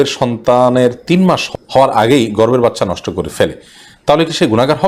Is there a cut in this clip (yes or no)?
yes